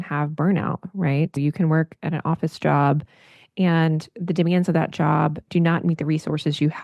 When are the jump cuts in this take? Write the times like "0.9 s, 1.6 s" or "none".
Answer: 1.4 s, 5.4 s